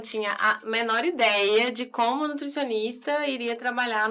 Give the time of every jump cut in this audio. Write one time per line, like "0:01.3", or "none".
none